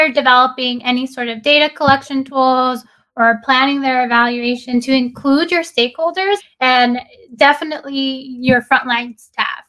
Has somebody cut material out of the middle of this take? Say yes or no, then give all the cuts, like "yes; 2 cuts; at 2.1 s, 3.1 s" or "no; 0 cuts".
yes; 1 cut; at 6.4 s